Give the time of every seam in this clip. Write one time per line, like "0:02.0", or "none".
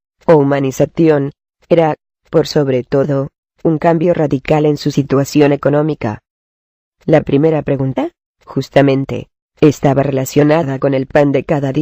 none